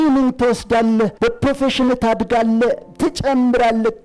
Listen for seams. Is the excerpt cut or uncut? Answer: cut